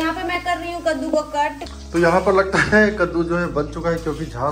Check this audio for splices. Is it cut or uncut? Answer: cut